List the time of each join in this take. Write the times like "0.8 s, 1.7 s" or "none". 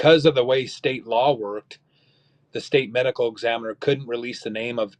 none